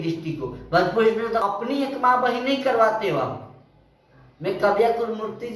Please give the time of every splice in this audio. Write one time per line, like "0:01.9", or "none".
0:01.4